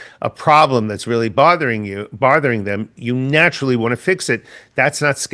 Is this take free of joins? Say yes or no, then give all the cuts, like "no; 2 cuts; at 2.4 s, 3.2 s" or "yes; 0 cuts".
yes; 0 cuts